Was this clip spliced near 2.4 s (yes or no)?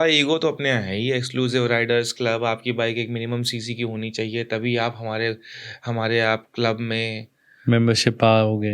no